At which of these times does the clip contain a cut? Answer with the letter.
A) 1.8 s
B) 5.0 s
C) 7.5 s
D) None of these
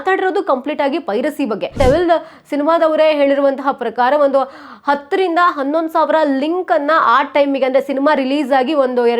A